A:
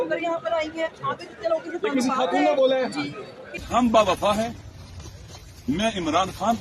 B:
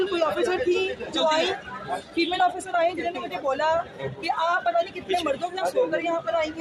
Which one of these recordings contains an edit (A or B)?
A